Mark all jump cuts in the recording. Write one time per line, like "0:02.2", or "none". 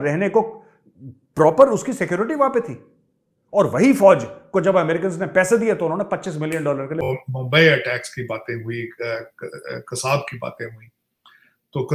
0:07.0